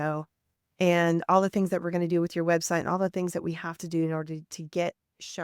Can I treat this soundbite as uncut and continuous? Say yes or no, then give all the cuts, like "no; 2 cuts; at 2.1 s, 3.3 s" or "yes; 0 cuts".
yes; 0 cuts